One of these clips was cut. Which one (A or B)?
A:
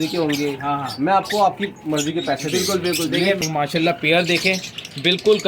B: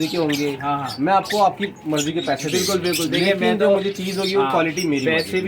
A